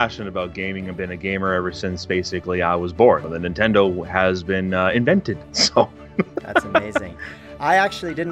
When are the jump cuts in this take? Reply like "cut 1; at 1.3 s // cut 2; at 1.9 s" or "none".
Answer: none